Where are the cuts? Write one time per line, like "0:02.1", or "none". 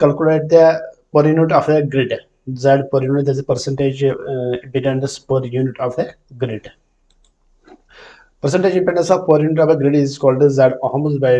none